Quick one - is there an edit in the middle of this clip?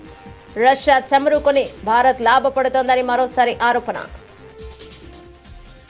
no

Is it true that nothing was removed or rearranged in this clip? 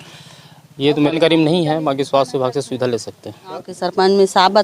no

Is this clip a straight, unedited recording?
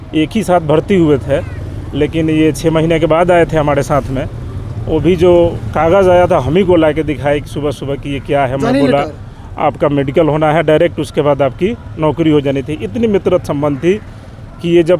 yes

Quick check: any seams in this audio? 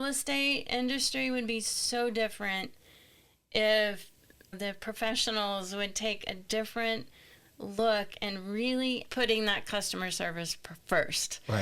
yes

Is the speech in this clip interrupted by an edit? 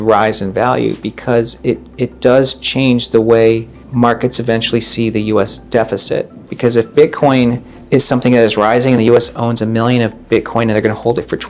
yes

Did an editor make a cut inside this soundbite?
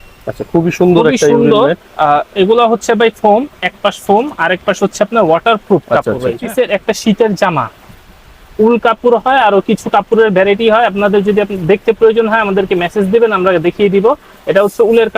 yes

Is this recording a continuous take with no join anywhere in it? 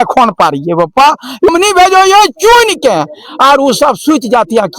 no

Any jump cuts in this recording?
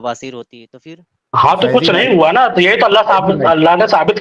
no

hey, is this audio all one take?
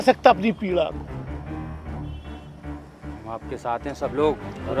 yes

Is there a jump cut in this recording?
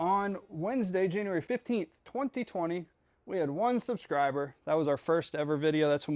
yes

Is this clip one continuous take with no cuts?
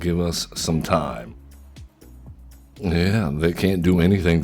no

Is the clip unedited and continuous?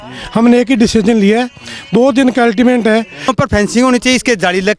no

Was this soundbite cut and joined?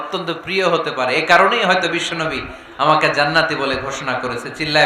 no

